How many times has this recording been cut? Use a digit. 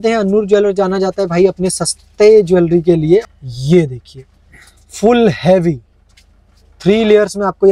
1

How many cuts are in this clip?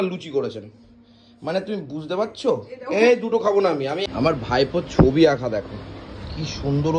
1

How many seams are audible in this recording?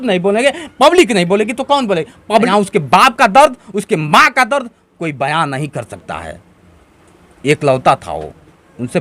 1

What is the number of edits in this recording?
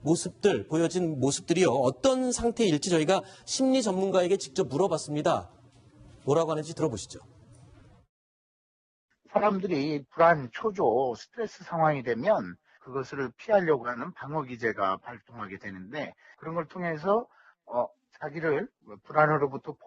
1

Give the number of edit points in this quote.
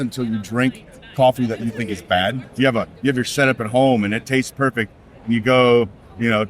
1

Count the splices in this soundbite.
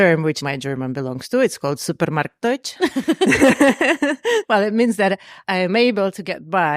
1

